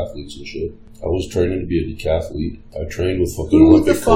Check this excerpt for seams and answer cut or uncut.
cut